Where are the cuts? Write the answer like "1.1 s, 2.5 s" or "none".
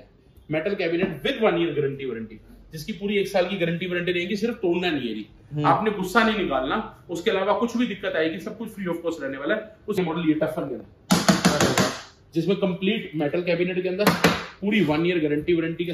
10.0 s